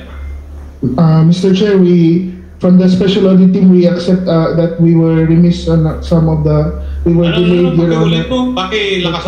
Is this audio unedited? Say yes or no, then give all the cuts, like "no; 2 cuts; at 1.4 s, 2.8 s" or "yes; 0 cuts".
yes; 0 cuts